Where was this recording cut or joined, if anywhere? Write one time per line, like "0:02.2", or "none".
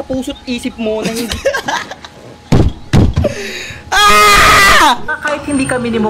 0:05.1

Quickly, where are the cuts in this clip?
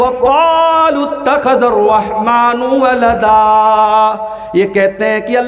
none

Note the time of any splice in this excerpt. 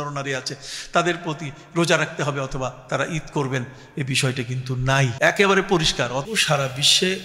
0:05.1
0:06.2

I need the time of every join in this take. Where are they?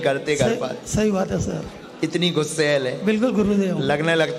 0:02.5

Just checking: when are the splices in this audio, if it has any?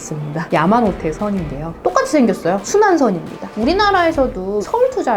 0:03.6

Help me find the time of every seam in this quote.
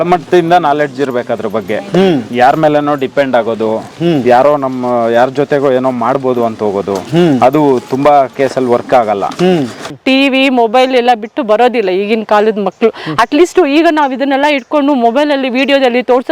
0:09.8

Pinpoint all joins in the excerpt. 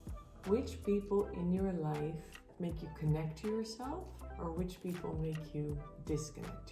0:02.4

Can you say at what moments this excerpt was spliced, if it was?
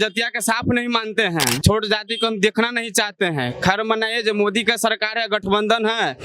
0:01.6

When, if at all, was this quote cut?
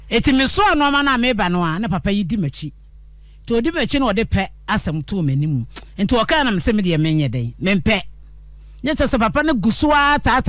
none

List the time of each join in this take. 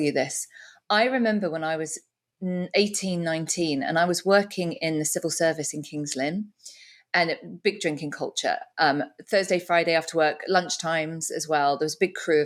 none

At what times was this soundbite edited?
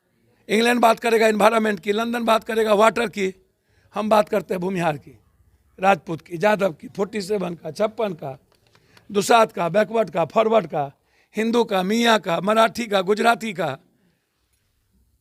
none

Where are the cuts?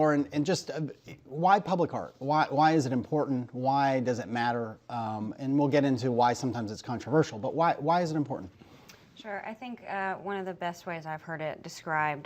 0:05.9

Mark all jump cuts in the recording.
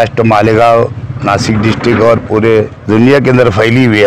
0:02.8

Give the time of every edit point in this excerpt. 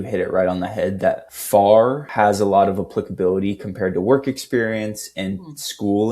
0:01.3
0:02.0

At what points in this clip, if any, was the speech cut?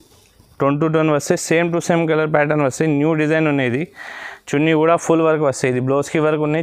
none

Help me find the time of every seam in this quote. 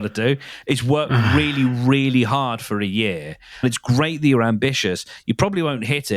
0:03.6

